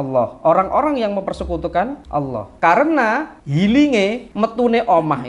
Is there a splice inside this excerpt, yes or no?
yes